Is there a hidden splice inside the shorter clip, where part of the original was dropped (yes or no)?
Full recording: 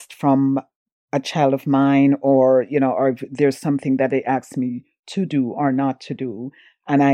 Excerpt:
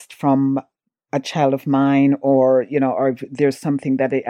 no